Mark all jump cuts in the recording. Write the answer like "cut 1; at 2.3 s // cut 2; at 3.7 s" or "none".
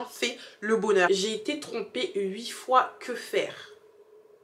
cut 1; at 1.1 s